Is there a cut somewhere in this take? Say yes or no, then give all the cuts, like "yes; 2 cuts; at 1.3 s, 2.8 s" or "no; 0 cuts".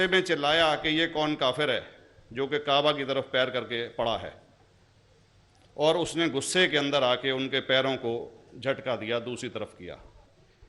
no; 0 cuts